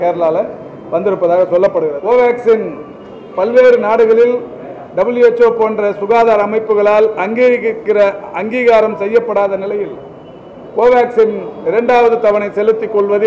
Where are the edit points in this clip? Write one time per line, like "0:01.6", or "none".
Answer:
0:02.0